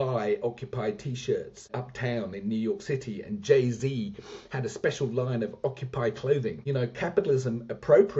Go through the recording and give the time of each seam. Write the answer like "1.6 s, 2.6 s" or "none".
1.7 s, 6.6 s